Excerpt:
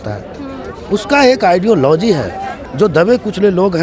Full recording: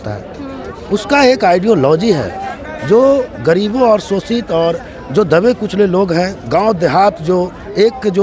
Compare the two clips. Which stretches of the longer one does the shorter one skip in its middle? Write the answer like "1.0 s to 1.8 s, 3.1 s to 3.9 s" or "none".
2.6 s to 4.9 s